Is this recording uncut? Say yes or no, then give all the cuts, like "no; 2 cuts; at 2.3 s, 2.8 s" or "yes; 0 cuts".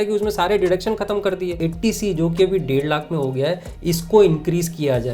no; 1 cut; at 1.6 s